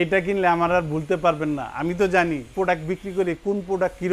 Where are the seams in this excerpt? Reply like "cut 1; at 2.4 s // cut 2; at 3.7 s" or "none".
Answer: none